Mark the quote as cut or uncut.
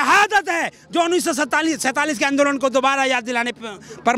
uncut